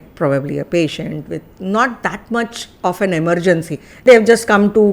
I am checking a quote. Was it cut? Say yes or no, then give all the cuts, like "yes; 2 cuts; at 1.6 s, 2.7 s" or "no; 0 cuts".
yes; 1 cut; at 4.0 s